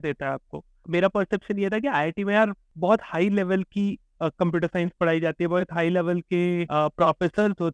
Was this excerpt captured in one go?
no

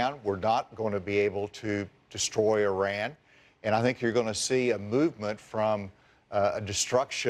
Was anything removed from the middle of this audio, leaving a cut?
no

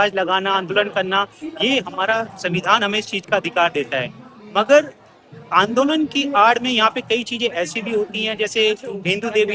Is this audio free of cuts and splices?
yes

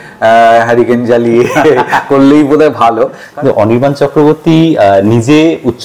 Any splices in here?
yes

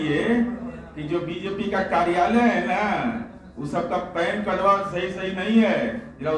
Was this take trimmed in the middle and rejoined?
no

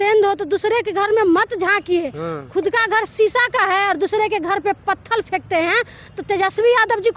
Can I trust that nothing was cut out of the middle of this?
yes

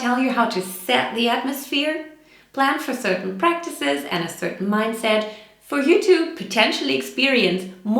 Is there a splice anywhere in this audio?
no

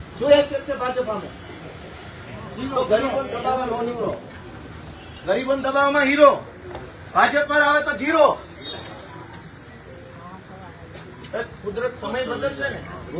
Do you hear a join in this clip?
no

